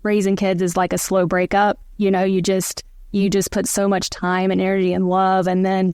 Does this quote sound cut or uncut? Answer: uncut